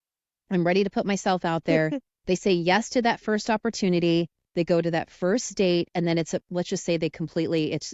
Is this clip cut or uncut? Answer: uncut